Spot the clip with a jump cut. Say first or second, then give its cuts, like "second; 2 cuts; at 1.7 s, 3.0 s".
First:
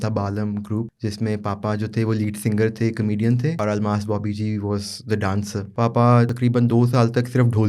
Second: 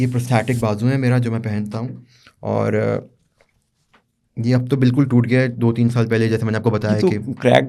first; 4 cuts; at 0.9 s, 3.6 s, 5.6 s, 6.3 s